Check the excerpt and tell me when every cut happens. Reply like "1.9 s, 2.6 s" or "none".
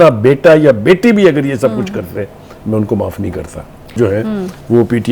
3.9 s

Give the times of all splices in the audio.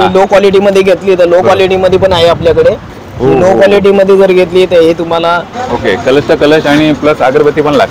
2.9 s, 5.5 s

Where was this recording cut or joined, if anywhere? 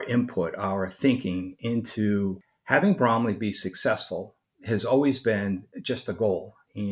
2.5 s

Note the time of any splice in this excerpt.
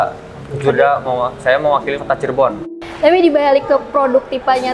2.8 s

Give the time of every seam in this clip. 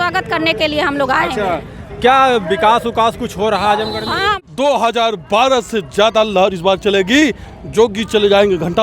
4.4 s

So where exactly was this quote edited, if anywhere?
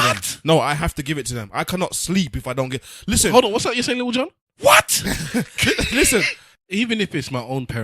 6.4 s

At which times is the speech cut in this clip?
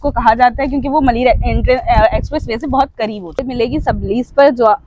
3.5 s

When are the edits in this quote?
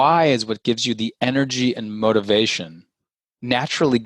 none

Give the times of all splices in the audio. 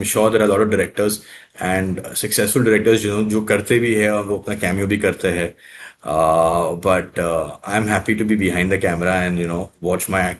none

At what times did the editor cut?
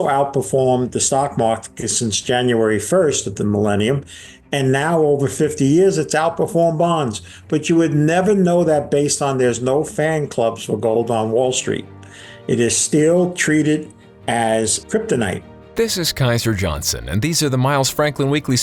14.8 s, 15.6 s

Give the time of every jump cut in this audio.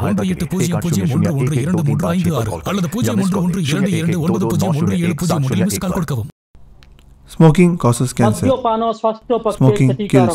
6.3 s

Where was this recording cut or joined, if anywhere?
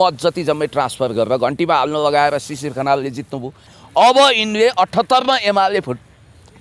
3.7 s

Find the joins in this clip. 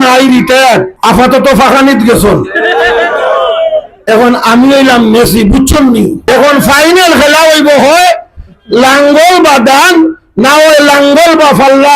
0.9 s, 6.3 s

